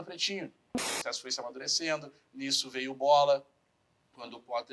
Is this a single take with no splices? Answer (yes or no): no